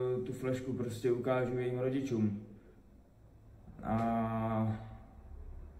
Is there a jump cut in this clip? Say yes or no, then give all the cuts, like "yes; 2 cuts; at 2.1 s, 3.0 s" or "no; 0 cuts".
no; 0 cuts